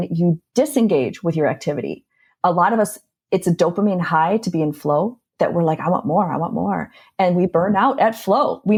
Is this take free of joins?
yes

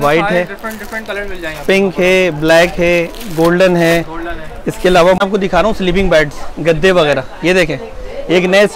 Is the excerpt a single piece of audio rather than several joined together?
no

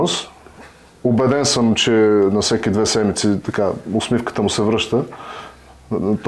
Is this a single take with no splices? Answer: yes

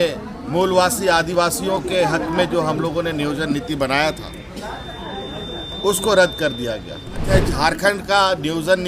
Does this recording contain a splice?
yes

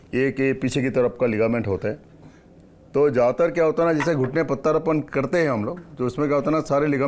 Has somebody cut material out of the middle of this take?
no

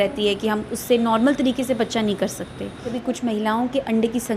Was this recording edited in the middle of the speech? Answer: yes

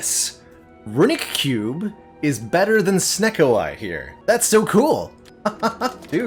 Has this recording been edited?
no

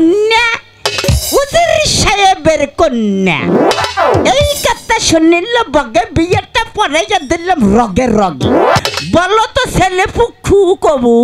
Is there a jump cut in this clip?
yes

